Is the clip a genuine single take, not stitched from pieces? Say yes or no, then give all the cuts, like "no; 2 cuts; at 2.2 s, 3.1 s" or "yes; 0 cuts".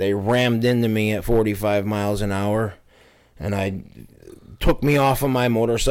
yes; 0 cuts